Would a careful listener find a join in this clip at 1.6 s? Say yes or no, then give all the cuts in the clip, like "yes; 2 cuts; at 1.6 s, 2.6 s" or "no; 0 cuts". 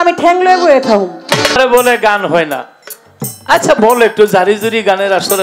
yes; 1 cut; at 1.6 s